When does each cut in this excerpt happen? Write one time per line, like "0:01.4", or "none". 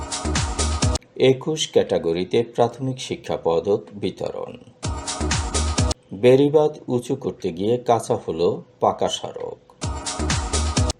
0:01.0